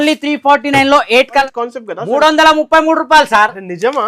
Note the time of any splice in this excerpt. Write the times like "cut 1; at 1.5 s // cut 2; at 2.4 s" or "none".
cut 1; at 1.4 s